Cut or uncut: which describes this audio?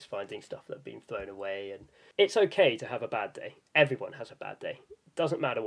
cut